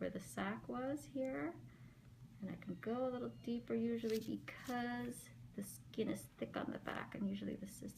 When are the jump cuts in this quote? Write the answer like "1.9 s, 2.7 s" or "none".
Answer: none